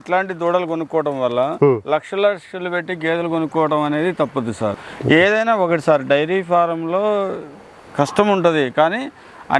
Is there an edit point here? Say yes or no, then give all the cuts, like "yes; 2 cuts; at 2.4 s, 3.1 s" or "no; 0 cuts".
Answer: yes; 1 cut; at 4.8 s